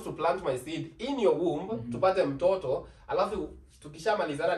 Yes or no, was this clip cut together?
no